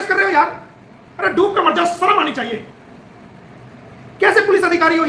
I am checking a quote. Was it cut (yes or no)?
no